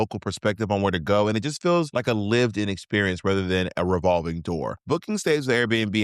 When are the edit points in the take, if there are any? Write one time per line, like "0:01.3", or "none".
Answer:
0:04.7